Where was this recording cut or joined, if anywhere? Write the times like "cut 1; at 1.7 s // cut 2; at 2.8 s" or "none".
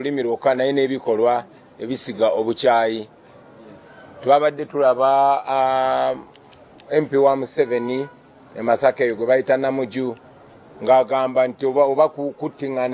none